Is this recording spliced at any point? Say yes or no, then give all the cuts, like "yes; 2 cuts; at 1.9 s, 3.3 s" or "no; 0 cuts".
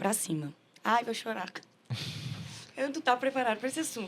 no; 0 cuts